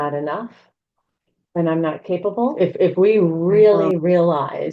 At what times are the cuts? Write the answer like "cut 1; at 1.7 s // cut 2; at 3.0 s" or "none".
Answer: cut 1; at 2.5 s

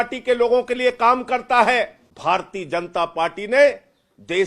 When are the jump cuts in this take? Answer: cut 1; at 2.0 s

